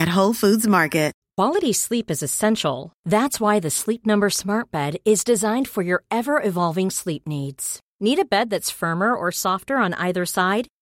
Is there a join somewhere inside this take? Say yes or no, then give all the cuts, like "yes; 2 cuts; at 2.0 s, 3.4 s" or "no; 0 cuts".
yes; 1 cut; at 1.2 s